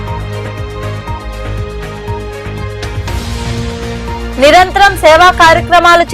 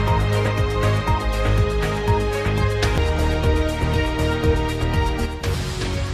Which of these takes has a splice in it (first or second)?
first